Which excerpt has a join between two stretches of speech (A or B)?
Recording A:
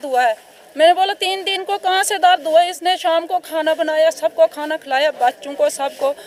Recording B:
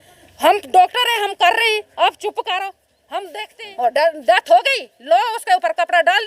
B